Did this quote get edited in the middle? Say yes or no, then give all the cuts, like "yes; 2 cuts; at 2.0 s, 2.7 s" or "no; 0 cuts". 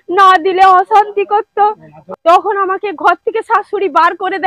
yes; 1 cut; at 2.0 s